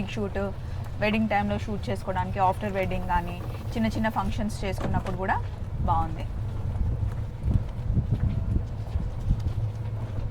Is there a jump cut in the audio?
no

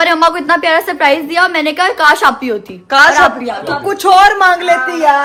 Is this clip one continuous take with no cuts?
yes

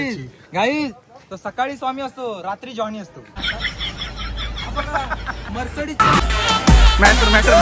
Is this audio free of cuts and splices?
no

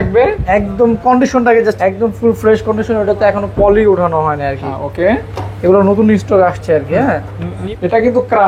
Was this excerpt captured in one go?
no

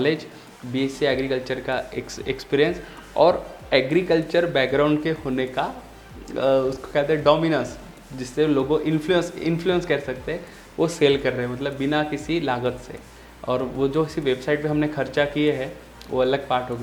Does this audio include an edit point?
no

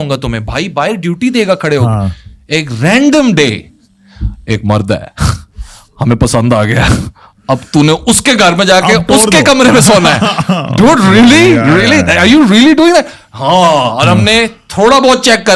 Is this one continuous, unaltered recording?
yes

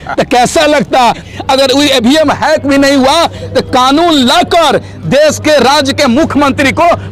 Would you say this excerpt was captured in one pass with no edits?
no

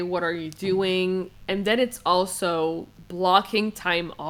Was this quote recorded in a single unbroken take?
yes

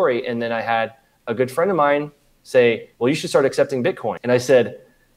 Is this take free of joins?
no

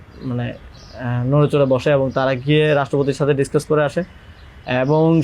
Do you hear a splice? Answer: no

